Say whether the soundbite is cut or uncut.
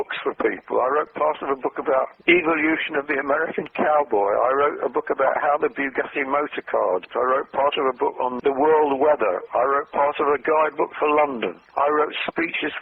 cut